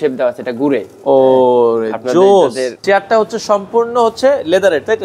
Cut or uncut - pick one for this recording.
cut